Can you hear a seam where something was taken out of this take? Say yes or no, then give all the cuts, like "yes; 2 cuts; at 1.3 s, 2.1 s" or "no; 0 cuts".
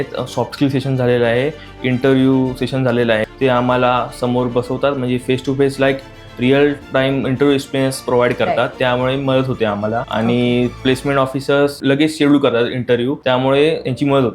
yes; 6 cuts; at 3.2 s, 8.7 s, 10.1 s, 10.8 s, 11.8 s, 13.2 s